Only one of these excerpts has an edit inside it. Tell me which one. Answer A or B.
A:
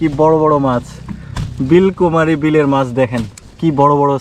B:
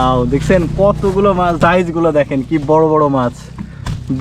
B